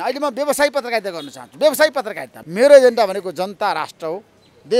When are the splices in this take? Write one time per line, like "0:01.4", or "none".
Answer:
0:02.3